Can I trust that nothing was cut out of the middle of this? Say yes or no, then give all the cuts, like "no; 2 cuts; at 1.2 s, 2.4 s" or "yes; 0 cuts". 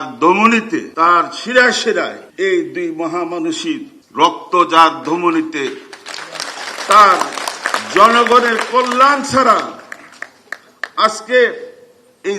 no; 3 cuts; at 0.9 s, 2.2 s, 4.0 s